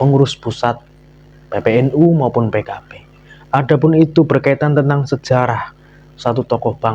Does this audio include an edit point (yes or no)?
no